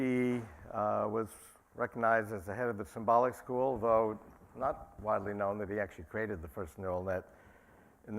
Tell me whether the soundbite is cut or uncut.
cut